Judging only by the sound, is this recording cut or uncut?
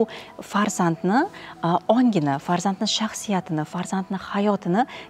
uncut